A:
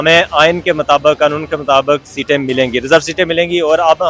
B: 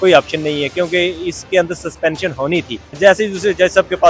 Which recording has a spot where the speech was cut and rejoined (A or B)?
B